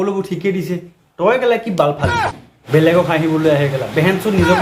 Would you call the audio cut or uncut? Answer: cut